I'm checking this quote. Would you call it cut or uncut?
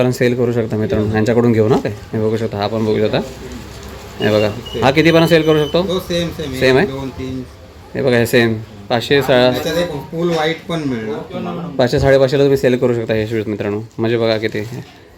uncut